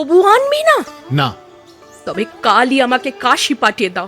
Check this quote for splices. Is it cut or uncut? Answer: cut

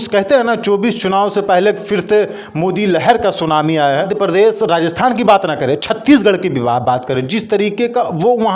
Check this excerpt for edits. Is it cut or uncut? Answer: cut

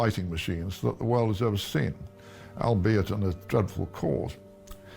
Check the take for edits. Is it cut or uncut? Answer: uncut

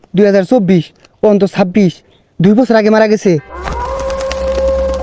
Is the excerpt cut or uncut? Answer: cut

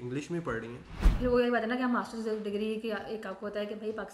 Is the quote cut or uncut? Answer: cut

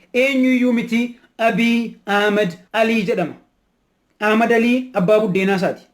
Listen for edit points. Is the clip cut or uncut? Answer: cut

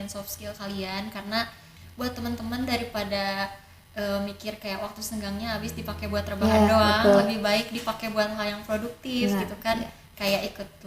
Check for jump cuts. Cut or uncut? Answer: cut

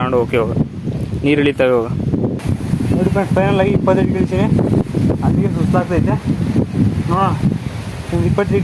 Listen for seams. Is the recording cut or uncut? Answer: cut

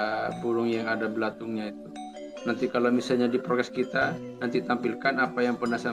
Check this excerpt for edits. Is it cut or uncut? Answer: uncut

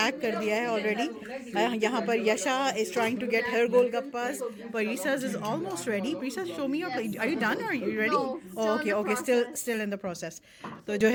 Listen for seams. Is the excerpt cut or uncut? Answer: uncut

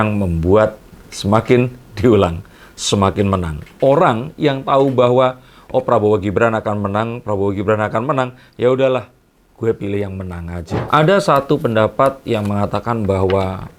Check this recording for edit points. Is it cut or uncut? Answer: uncut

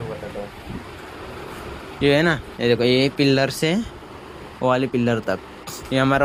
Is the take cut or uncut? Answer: uncut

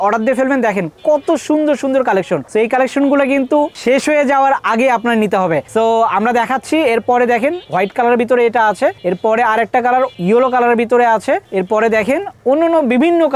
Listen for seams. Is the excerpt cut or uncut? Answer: uncut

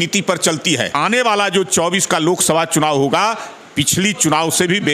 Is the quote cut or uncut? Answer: cut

